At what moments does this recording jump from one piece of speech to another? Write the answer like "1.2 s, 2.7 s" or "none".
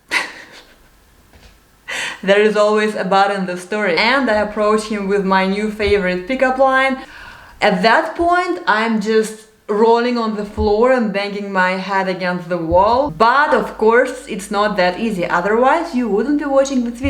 4.0 s, 7.1 s, 13.1 s

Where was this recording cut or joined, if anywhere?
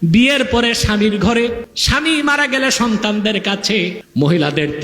1.7 s, 4.0 s

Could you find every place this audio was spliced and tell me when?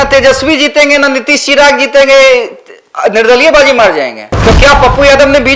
4.2 s

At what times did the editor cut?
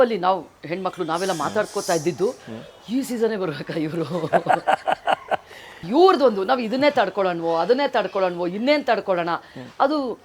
5.8 s

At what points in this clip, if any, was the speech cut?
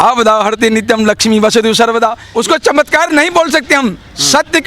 2.2 s

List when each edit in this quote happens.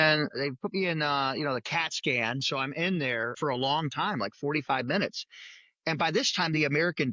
3.4 s

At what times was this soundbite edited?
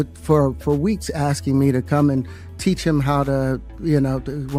none

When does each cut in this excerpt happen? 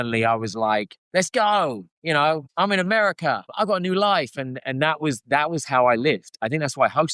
1.0 s, 2.5 s, 3.5 s

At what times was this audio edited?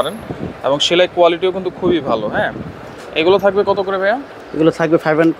none

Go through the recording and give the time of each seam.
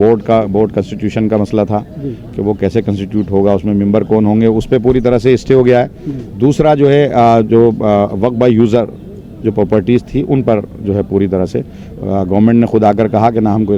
none

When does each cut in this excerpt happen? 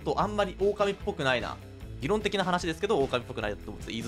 1.9 s

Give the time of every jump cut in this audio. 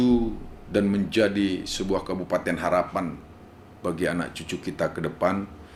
none

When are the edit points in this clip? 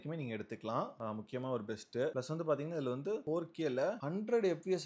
3.2 s

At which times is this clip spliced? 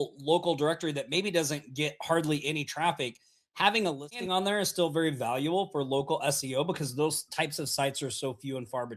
none

